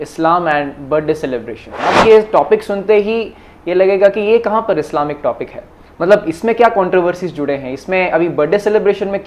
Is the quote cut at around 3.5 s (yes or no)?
no